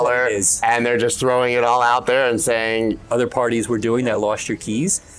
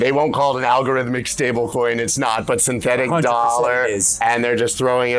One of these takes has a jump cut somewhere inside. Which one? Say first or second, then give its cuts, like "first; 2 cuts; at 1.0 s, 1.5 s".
first; 1 cut; at 3.0 s